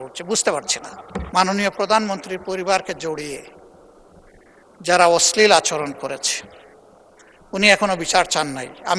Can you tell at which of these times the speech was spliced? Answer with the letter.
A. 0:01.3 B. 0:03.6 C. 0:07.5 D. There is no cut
A